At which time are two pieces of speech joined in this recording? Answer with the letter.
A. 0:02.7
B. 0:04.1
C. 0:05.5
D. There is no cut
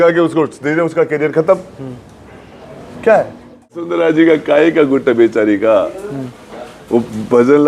B